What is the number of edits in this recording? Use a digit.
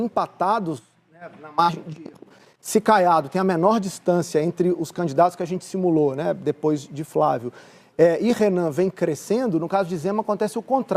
0